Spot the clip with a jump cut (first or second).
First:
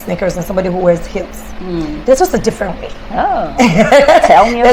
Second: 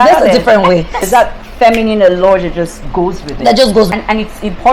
second